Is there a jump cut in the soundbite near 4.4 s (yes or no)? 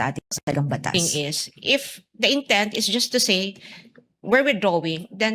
no